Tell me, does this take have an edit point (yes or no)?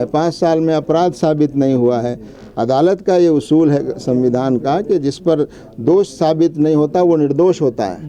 no